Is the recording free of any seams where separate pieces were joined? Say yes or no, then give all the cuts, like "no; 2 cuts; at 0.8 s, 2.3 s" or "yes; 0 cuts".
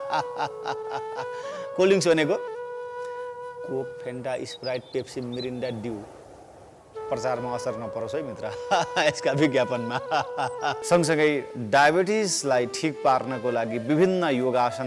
no; 1 cut; at 10.8 s